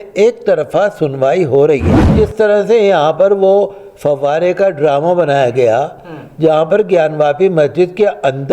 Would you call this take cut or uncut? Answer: cut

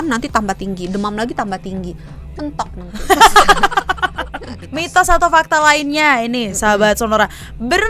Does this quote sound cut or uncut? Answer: cut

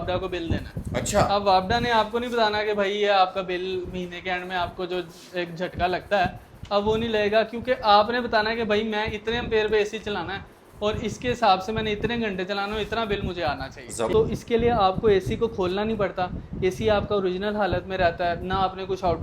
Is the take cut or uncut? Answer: cut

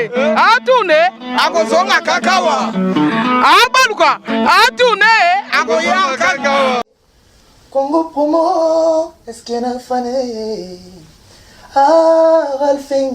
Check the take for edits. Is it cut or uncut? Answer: cut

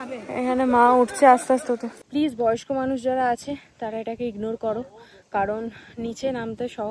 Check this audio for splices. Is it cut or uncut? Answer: cut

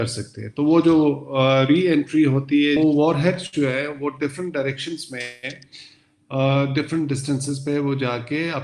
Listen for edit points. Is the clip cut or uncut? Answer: cut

